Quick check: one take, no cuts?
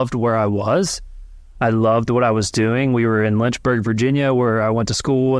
yes; 0 cuts

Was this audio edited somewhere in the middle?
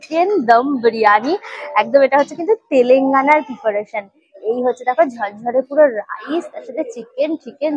no; 0 cuts

